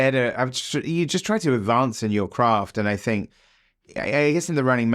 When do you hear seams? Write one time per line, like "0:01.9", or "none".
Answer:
none